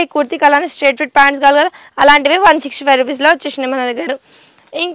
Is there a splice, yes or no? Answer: no